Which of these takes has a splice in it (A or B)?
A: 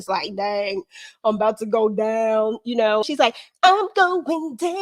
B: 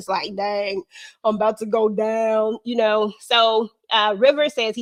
A